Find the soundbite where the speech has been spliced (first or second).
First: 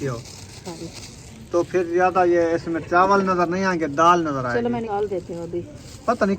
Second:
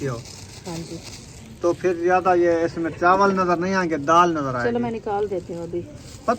first